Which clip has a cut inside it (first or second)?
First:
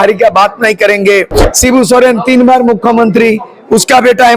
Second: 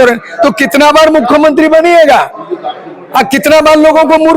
first